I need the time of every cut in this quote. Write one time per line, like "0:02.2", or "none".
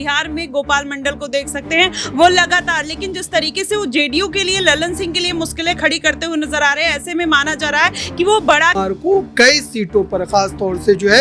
0:08.8